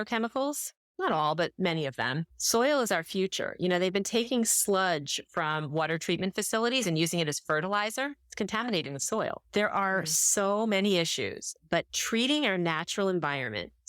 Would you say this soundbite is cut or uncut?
cut